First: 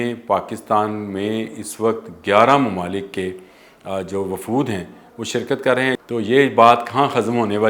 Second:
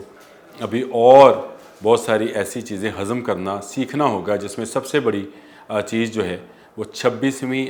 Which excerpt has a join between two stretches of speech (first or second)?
first